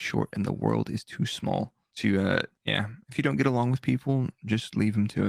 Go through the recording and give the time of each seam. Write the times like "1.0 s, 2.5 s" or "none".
1.8 s, 2.6 s

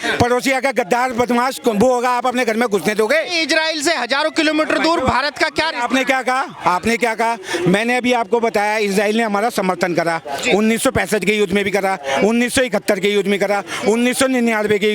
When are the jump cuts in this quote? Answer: none

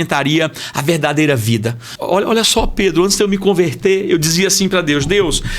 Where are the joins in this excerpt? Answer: 1.9 s

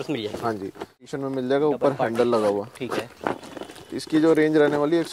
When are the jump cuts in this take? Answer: 1.1 s

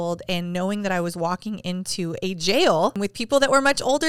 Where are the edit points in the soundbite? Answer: 3.0 s

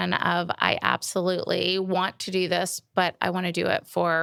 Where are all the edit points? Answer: none

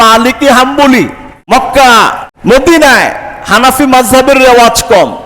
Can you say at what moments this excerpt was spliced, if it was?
1.5 s, 2.3 s

